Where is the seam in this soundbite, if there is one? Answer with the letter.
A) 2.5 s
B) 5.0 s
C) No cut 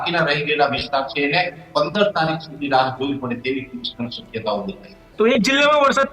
B